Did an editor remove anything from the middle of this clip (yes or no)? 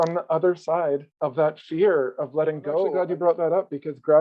yes